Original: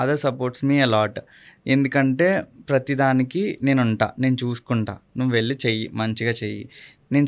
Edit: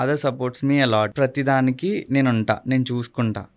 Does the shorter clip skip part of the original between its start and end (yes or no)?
yes